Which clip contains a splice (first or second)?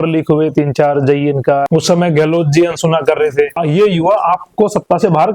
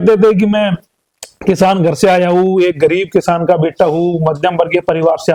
first